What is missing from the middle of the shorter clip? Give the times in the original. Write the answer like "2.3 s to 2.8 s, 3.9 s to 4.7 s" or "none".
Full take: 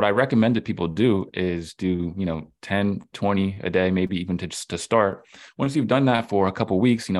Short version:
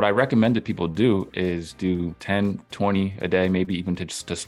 2.1 s to 2.5 s